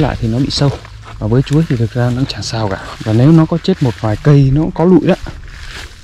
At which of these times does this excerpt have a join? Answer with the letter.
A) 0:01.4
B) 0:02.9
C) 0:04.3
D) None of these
B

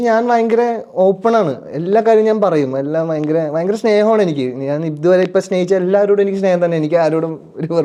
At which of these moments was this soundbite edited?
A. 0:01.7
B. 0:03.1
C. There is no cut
C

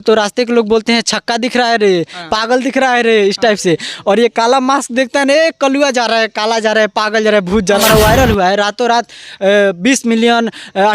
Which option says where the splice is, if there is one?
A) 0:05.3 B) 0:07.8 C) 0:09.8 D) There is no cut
B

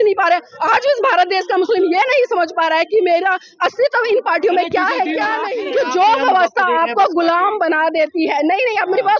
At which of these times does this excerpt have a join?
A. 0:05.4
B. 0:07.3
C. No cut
A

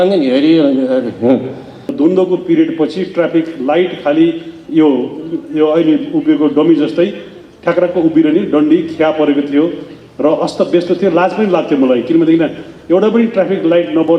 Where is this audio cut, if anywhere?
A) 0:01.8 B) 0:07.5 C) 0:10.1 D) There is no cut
A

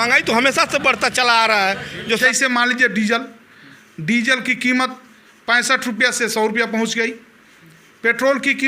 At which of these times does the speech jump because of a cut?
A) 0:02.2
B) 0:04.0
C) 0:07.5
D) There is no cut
A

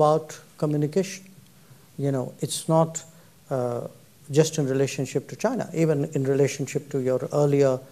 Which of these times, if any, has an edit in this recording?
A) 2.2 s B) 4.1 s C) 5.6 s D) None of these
D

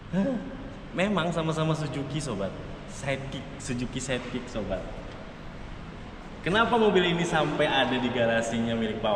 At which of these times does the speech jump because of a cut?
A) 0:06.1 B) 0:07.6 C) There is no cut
C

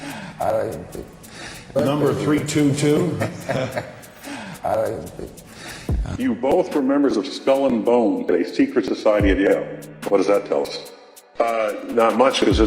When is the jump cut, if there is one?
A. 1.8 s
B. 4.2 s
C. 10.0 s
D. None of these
A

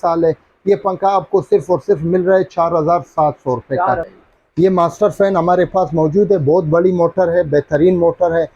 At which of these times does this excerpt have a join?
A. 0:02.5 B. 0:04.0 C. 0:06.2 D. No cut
B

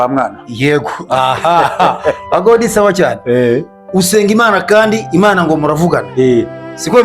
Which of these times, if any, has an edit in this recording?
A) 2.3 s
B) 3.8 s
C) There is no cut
B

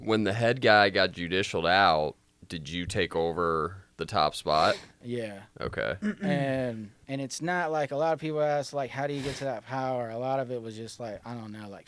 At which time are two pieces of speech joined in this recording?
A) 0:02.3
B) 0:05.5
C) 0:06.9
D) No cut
C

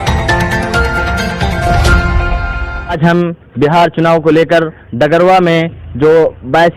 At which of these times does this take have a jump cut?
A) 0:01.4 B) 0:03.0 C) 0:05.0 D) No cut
B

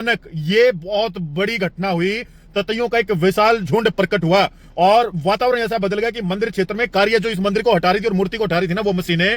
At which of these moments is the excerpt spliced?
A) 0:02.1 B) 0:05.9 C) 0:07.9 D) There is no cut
D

